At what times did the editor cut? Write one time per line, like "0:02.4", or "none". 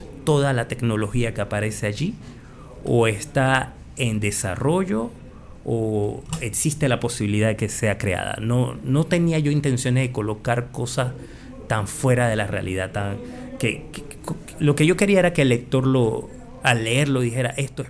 none